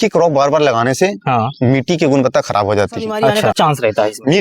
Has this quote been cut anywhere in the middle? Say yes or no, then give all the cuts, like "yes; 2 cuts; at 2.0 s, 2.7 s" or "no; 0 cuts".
yes; 1 cut; at 3.4 s